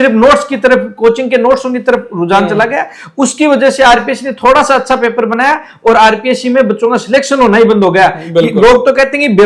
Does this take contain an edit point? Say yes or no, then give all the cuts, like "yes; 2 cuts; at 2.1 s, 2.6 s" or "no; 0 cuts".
no; 0 cuts